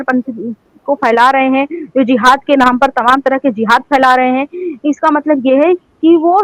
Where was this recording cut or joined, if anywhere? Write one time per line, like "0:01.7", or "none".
none